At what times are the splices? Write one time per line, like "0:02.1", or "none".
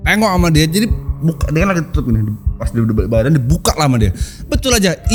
none